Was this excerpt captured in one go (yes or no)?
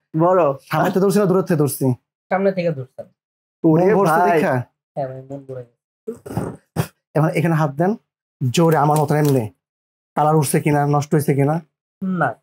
yes